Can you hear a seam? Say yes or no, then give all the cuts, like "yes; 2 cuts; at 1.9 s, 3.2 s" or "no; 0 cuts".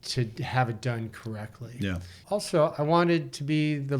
yes; 1 cut; at 2.1 s